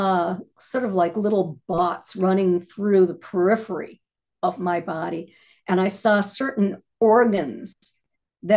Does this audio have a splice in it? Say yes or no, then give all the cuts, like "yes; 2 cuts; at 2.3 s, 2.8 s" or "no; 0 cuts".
no; 0 cuts